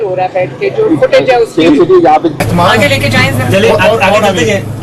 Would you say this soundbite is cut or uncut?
cut